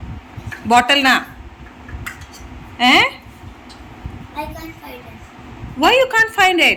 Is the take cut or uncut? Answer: uncut